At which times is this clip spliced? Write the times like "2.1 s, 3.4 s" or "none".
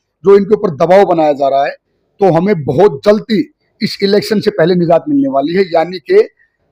none